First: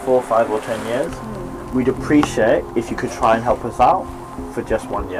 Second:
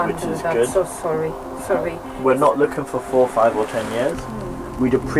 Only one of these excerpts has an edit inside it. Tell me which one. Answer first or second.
second